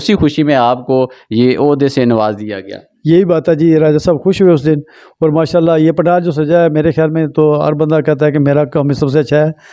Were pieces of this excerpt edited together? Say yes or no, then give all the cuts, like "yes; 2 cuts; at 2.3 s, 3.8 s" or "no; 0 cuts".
no; 0 cuts